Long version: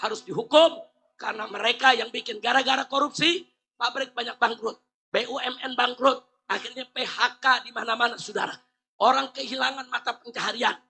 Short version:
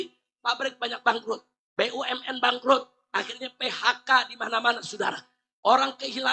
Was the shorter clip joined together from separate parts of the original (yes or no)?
no